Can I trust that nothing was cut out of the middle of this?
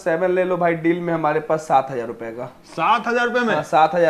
yes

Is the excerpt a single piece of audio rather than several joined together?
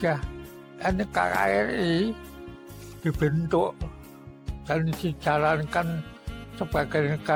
yes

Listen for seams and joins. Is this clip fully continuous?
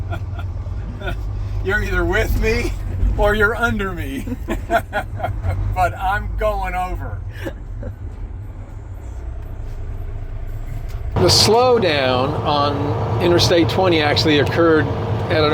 yes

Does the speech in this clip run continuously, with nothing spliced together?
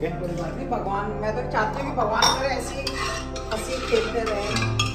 yes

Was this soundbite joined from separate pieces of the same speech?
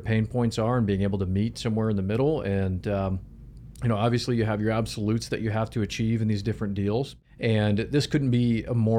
yes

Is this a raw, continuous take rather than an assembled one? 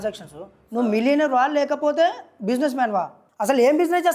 no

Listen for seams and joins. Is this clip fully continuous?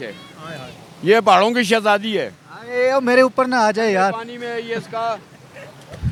yes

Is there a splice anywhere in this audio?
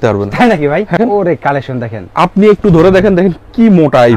yes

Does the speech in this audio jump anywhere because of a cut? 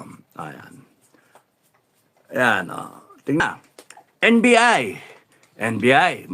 yes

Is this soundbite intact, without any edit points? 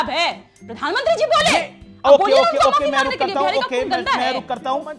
yes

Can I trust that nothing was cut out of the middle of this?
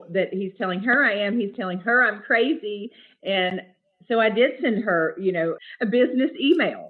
no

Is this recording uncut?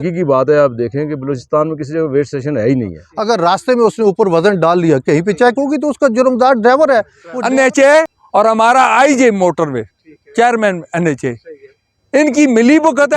no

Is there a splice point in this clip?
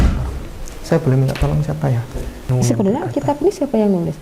yes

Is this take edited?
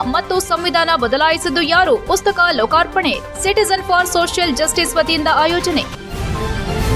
yes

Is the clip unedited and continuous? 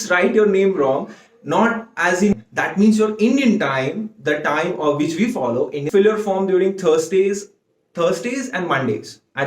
no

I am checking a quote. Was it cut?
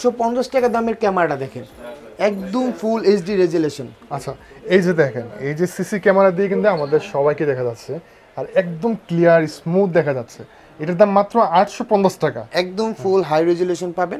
no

